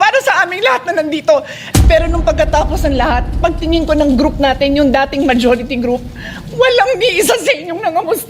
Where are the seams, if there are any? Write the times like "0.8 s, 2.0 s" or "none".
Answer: 1.6 s